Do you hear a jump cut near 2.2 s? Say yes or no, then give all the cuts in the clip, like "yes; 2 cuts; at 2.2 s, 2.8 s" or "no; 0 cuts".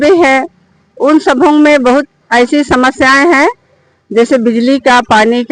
yes; 1 cut; at 2.2 s